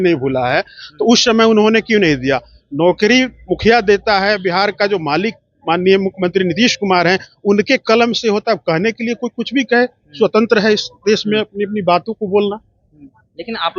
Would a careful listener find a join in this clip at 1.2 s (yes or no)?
no